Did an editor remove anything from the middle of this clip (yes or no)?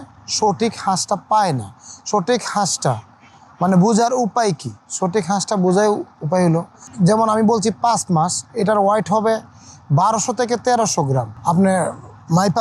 yes